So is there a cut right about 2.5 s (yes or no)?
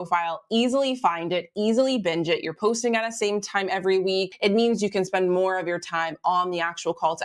no